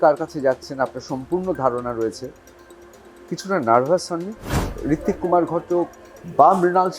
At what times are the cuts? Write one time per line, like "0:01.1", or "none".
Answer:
0:04.7